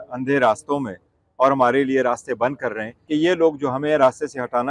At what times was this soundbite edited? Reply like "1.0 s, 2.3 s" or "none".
2.9 s